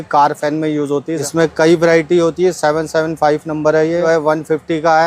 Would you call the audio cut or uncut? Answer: cut